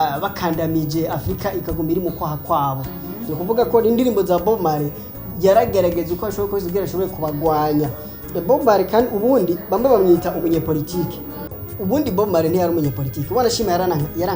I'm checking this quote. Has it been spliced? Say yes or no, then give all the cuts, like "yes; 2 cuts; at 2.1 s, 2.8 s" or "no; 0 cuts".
no; 0 cuts